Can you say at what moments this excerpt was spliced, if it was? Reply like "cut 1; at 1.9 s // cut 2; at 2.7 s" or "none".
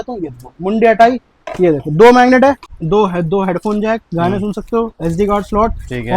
cut 1; at 2.7 s